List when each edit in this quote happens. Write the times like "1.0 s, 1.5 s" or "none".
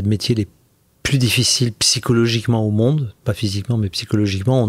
none